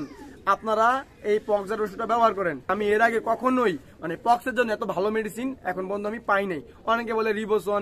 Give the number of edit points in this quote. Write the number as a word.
one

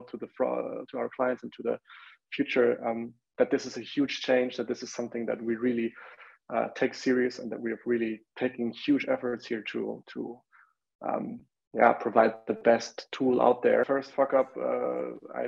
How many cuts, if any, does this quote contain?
one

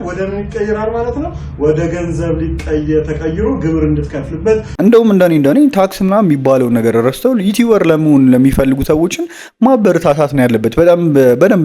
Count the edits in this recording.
one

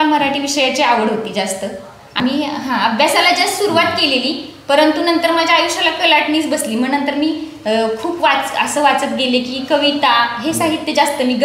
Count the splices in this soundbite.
one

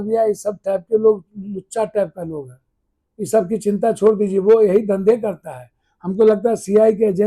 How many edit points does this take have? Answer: zero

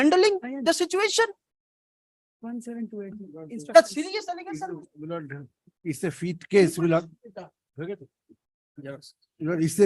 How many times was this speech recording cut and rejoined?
zero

